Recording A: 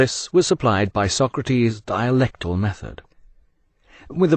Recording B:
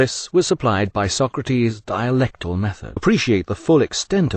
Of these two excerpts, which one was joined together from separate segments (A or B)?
A